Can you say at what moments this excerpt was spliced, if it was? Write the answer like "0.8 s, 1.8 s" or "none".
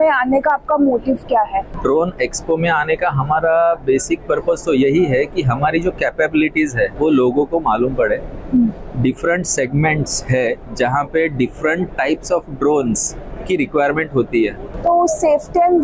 1.7 s, 6.9 s, 14.7 s